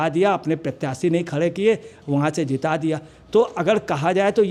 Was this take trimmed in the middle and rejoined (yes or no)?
no